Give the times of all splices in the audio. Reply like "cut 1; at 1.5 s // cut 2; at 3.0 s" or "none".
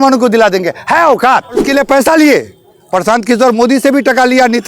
cut 1; at 1.6 s